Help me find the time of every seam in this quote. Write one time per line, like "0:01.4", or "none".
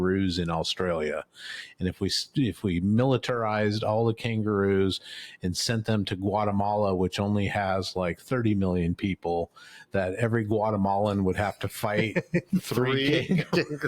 none